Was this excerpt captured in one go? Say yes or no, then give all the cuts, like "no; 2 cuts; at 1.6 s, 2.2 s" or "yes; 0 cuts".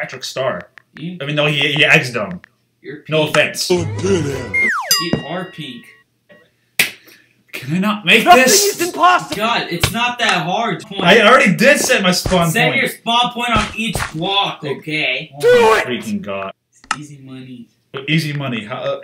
no; 3 cuts; at 6.3 s, 10.9 s, 16.5 s